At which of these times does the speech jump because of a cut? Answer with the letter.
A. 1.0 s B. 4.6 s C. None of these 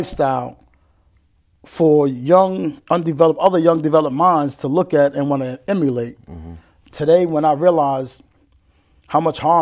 C